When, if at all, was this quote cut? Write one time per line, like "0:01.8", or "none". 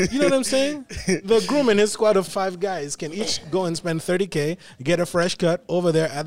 0:02.3